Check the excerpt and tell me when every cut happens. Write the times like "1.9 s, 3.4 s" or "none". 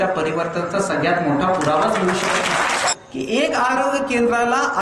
2.9 s